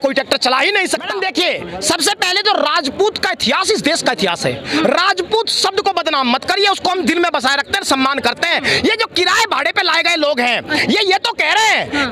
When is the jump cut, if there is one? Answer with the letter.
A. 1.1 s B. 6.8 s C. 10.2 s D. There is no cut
A